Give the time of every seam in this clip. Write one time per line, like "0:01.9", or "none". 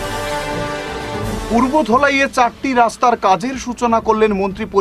0:01.3